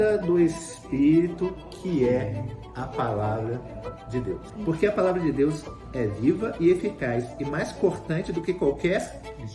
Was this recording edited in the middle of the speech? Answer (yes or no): yes